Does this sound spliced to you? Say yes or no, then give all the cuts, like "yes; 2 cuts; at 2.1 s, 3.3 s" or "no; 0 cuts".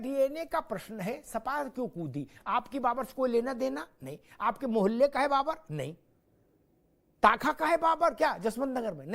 yes; 1 cut; at 5.9 s